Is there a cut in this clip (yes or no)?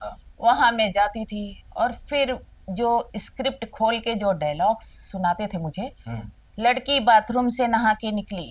no